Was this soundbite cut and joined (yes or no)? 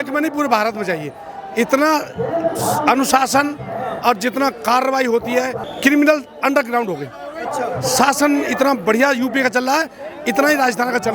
yes